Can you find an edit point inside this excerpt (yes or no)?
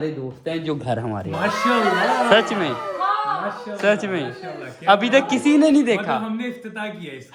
no